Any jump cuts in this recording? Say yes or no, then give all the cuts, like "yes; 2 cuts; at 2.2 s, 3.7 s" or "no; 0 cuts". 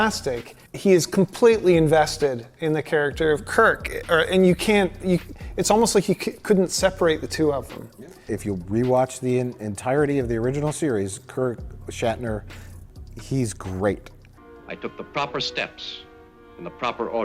yes; 1 cut; at 8.3 s